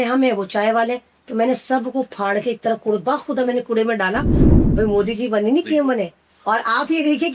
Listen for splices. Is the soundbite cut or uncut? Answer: cut